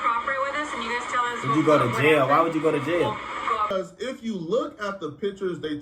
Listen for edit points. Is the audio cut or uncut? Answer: cut